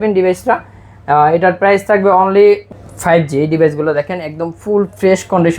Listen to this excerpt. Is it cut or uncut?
cut